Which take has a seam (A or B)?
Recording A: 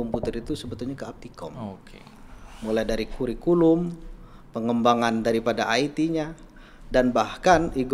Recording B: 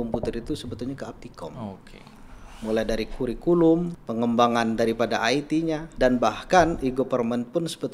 B